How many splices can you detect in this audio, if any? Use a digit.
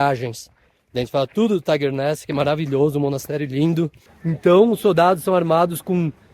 1